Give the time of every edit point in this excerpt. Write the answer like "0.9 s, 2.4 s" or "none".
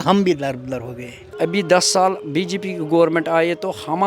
1.3 s